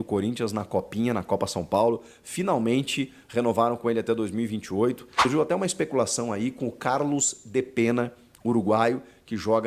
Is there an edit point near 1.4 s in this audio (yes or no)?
no